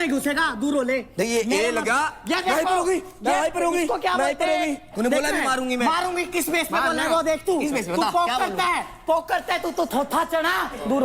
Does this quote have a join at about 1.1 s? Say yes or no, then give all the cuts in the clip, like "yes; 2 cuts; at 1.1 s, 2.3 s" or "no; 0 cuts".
yes; 1 cut; at 1.1 s